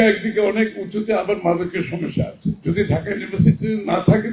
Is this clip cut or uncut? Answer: cut